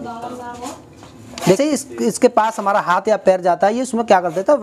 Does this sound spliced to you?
yes; 1 cut; at 1.6 s

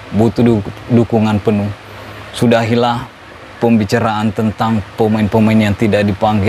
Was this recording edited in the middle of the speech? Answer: no; 0 cuts

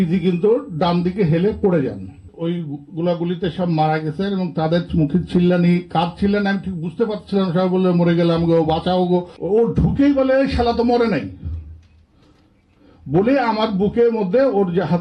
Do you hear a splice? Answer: yes; 2 cuts; at 2.3 s, 9.3 s

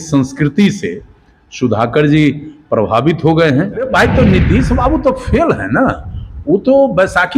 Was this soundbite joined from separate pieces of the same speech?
yes; 1 cut; at 3.9 s

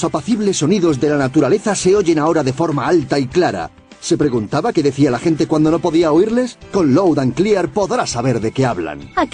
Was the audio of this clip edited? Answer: no; 0 cuts

